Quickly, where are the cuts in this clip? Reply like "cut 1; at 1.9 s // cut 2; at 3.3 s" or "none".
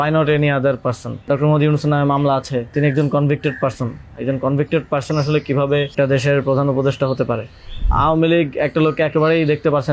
cut 1; at 1.2 s // cut 2; at 2.7 s // cut 3; at 5.9 s // cut 4; at 7.9 s